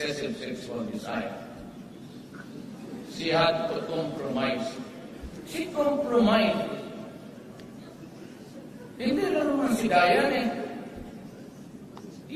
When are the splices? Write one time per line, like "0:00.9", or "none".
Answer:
0:06.2